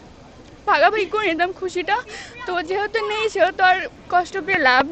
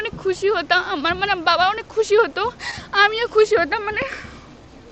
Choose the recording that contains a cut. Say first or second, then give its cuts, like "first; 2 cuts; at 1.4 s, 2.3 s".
first; 1 cut; at 3.9 s